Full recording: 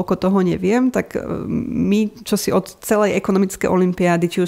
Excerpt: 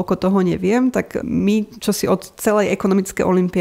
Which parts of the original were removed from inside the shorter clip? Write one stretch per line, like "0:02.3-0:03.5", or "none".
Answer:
0:01.2-0:01.7